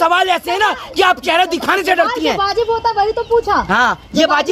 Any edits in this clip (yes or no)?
no